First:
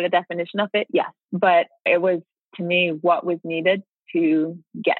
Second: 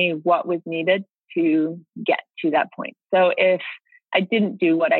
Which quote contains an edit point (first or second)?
first